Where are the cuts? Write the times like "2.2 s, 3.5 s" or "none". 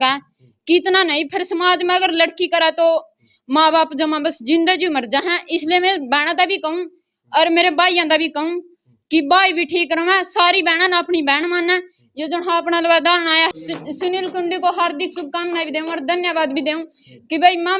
none